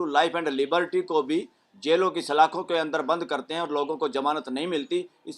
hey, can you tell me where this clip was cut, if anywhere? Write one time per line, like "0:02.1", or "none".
none